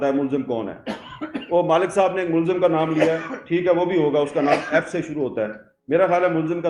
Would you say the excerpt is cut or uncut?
uncut